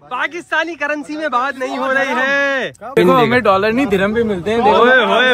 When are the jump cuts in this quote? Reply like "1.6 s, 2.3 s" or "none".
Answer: 3.0 s